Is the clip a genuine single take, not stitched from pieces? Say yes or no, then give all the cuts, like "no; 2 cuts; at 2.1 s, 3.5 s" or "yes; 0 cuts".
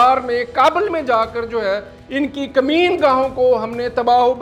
yes; 0 cuts